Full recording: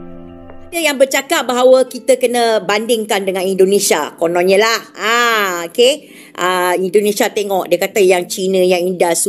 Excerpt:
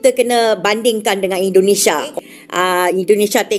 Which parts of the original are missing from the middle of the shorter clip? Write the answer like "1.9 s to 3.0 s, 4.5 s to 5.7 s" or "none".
4.2 s to 6.0 s